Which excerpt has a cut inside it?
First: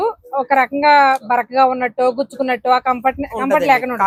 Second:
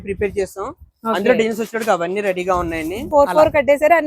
second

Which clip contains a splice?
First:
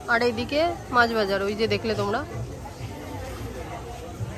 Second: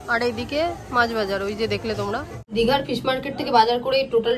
second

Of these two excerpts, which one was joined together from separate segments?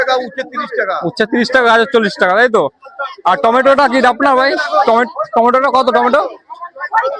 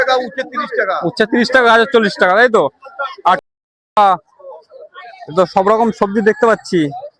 second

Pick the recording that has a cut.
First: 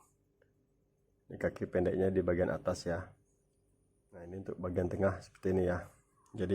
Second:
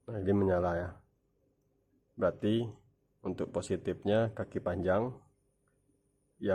first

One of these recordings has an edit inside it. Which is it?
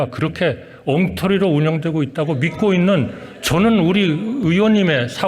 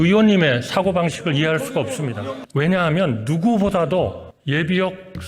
second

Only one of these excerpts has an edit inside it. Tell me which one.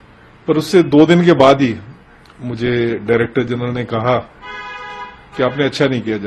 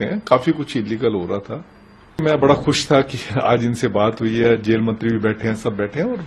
second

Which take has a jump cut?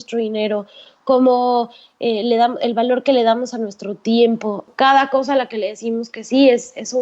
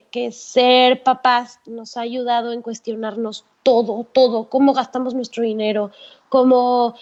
first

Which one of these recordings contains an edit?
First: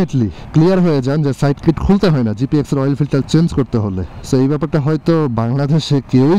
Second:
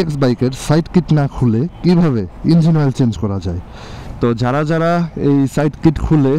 second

